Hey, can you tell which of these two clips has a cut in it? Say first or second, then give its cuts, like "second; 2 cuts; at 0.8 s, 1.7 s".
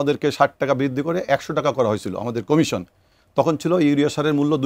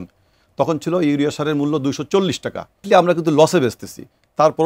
second; 1 cut; at 2.8 s